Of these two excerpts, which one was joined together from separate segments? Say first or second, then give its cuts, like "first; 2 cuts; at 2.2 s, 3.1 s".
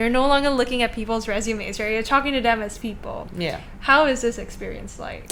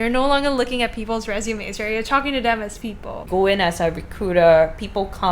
second; 1 cut; at 3.2 s